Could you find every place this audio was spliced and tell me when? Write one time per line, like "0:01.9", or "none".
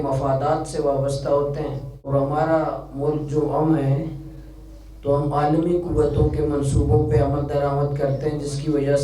0:02.1